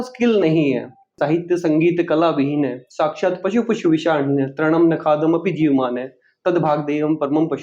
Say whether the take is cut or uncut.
cut